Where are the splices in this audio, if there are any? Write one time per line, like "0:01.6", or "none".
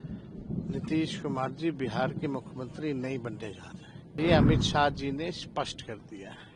0:04.2